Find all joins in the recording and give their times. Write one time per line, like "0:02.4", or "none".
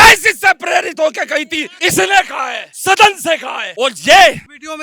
none